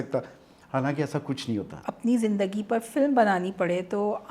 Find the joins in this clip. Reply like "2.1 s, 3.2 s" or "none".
1.8 s